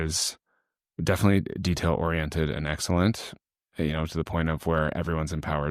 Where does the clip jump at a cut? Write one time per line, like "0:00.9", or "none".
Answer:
none